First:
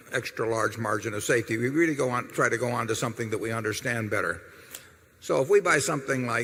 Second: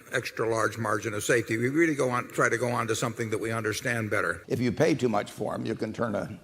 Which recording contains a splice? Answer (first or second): second